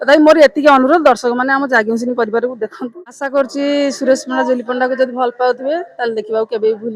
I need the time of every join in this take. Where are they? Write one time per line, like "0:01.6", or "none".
0:02.8

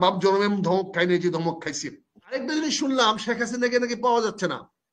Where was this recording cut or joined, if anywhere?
0:02.4

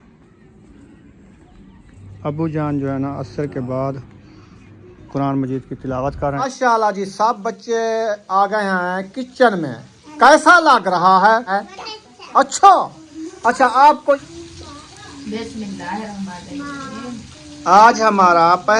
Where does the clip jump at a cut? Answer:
0:06.4
0:11.5
0:14.2

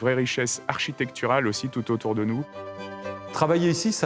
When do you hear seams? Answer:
0:03.0

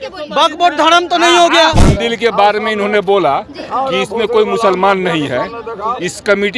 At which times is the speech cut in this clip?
0:01.9

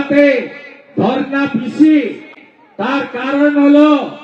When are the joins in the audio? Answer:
none

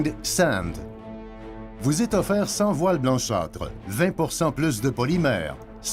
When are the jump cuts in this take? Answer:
0:01.3

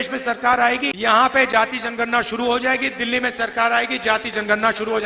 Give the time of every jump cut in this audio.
0:00.9

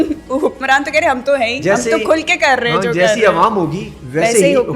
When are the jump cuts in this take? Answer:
none

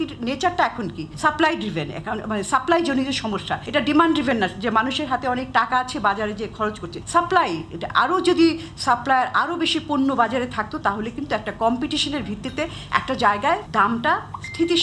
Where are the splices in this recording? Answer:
0:01.0
0:03.6
0:06.9
0:13.7

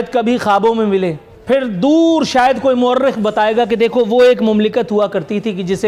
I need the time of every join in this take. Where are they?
0:01.3

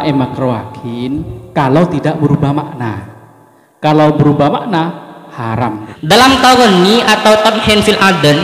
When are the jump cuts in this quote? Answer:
0:01.3
0:05.9

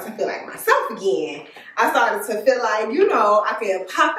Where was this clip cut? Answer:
none

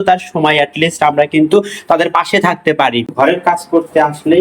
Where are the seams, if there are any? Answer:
0:03.1

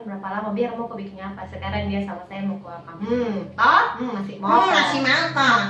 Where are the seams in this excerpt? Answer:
none

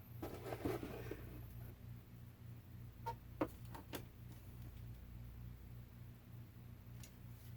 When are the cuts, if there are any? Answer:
0:01.7

